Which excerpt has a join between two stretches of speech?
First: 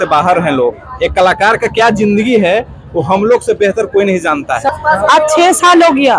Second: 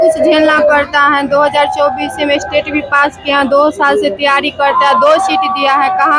first; 1 cut; at 4.7 s

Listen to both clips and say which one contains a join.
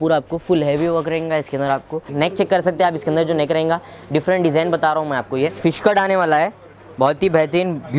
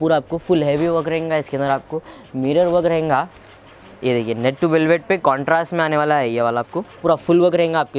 first; 2 cuts; at 2.1 s, 5.6 s

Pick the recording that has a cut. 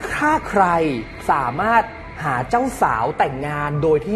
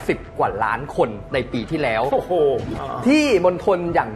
second; 1 cut; at 2.7 s

